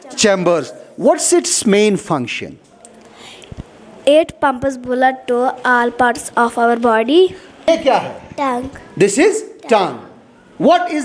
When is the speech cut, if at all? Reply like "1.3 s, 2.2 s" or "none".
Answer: 7.6 s